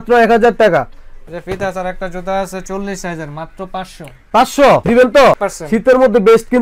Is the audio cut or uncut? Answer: uncut